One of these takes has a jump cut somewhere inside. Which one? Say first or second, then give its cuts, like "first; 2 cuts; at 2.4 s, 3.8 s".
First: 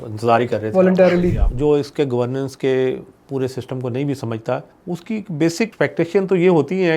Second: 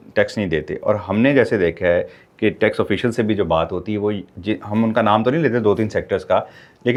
first; 3 cuts; at 1.4 s, 4.7 s, 5.7 s